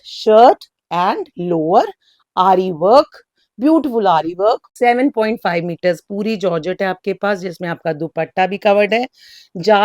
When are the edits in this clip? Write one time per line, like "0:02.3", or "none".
0:04.7